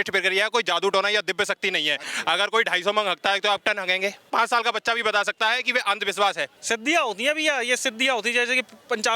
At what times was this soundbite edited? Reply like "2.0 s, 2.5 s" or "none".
2.1 s, 4.3 s, 6.6 s